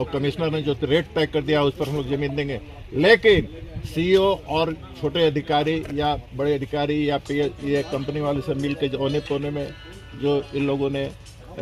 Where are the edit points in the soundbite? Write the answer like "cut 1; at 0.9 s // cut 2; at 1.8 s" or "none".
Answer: none

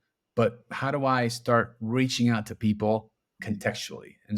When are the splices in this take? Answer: cut 1; at 3.4 s

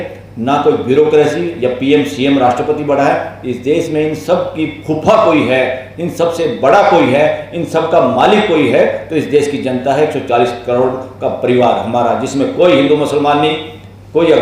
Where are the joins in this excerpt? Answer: none

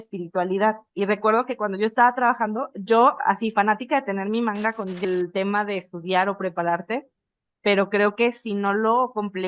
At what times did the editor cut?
cut 1; at 5.0 s

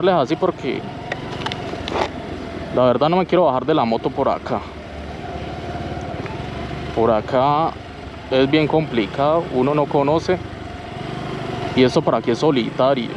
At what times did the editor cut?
none

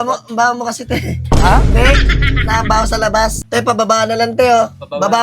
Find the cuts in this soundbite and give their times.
cut 1; at 3.4 s

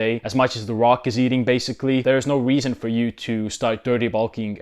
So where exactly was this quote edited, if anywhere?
cut 1; at 2.0 s

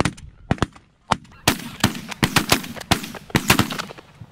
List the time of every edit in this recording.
cut 1; at 1.3 s

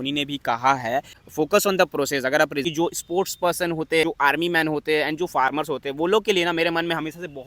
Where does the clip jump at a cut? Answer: cut 1; at 1.2 s // cut 2; at 2.6 s // cut 3; at 4.0 s

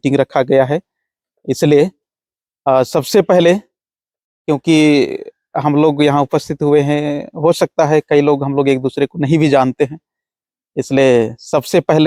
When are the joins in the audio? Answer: none

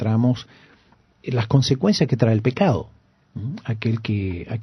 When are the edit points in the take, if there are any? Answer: cut 1; at 1.8 s

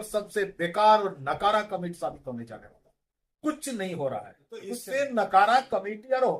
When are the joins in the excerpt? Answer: cut 1; at 4.8 s

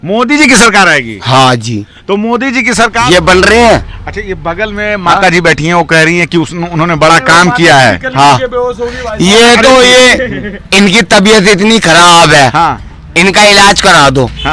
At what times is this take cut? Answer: cut 1; at 3.0 s

